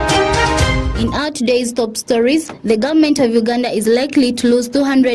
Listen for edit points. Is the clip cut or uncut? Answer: cut